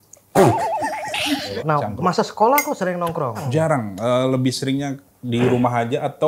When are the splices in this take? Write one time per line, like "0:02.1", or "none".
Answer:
0:01.5
0:03.5